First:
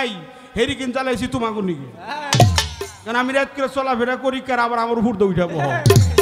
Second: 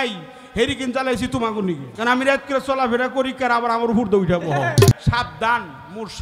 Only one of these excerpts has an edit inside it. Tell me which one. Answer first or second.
second